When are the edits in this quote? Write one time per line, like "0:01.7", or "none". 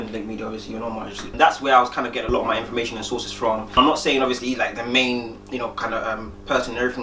none